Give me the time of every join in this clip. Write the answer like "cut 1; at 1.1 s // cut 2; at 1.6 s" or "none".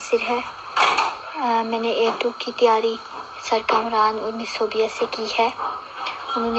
none